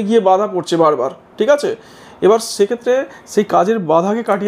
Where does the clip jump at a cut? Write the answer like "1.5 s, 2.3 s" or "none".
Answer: none